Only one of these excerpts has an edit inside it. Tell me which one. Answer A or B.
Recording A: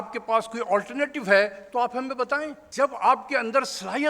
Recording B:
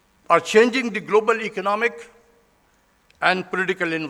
A